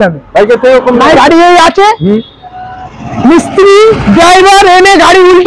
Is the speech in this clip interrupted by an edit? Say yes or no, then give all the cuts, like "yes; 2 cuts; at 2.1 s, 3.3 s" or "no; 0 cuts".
yes; 1 cut; at 1.1 s